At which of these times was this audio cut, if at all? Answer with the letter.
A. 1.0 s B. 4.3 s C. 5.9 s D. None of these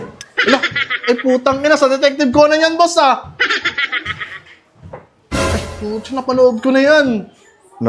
D